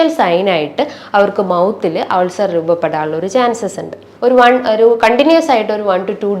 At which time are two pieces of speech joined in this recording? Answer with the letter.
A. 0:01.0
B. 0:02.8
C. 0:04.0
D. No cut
C